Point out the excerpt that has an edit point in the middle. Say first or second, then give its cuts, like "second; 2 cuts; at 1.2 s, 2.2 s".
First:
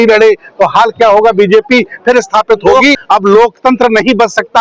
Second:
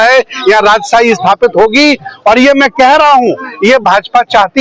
first; 1 cut; at 2.9 s